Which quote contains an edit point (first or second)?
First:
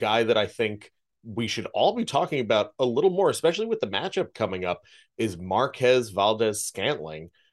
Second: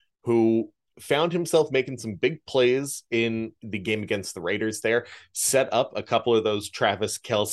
second